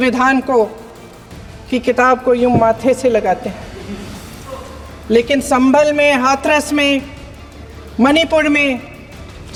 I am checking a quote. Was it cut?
no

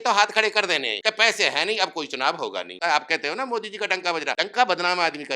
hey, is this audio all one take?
no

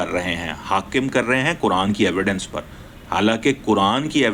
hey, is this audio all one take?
yes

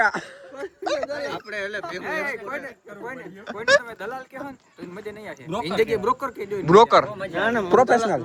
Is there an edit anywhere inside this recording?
no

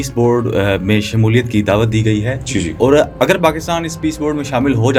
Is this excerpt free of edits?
yes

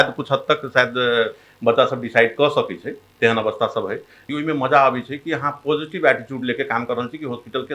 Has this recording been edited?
yes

